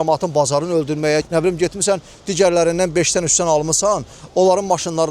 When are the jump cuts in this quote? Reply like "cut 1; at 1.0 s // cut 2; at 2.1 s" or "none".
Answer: cut 1; at 1.3 s